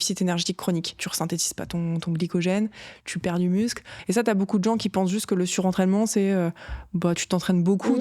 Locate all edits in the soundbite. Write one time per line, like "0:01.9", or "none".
0:01.1
0:03.9